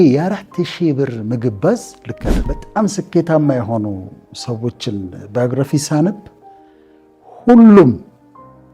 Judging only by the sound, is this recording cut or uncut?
cut